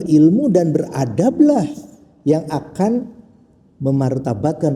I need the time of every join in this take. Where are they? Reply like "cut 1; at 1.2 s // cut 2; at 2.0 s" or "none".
none